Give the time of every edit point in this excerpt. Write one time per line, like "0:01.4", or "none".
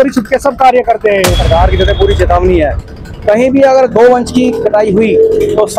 0:01.4